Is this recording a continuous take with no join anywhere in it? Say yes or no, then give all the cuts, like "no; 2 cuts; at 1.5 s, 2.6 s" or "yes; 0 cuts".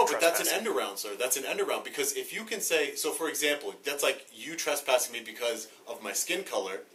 yes; 0 cuts